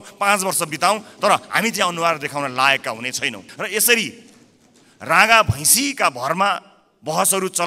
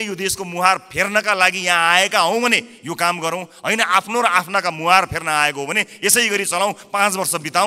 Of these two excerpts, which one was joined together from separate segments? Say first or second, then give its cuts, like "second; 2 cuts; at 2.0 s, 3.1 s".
first; 1 cut; at 3.5 s